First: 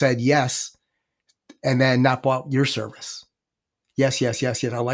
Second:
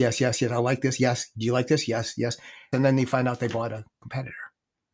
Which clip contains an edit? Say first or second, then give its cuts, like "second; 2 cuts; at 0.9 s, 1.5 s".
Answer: second; 1 cut; at 2.7 s